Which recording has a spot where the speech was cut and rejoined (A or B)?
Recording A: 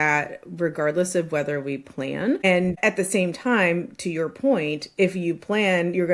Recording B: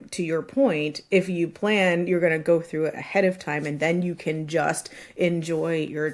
A